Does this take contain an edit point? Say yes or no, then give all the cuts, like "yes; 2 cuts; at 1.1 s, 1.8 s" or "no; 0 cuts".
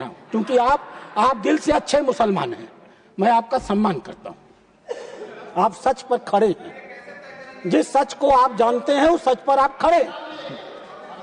no; 0 cuts